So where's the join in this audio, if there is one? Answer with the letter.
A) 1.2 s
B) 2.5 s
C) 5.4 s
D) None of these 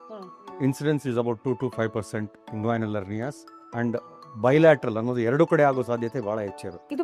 D